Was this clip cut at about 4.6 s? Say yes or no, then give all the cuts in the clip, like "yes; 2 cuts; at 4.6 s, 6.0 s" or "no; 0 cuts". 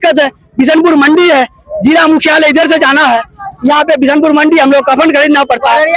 no; 0 cuts